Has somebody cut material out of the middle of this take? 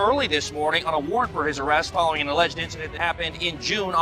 yes; 1 cut; at 2.9 s

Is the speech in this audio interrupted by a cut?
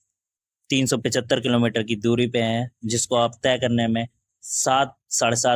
no; 0 cuts

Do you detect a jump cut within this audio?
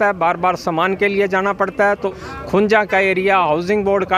yes; 1 cut; at 2.2 s

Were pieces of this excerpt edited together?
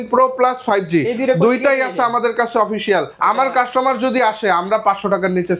yes; 1 cut; at 3.1 s

